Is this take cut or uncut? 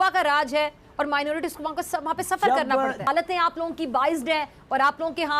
cut